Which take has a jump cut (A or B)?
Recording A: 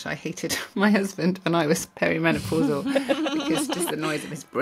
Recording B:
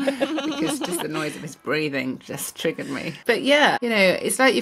B